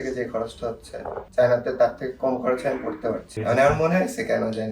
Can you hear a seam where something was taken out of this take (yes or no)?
yes